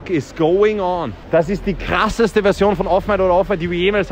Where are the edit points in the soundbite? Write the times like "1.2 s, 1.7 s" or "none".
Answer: none